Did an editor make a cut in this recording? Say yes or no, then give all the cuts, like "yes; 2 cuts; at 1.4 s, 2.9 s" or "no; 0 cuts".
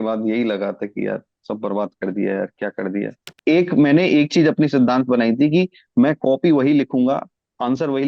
yes; 1 cut; at 3.2 s